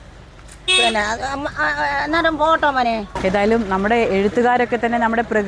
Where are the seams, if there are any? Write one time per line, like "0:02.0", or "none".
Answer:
0:03.1